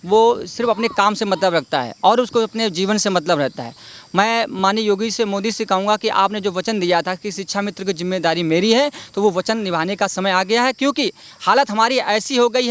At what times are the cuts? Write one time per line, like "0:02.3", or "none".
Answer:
none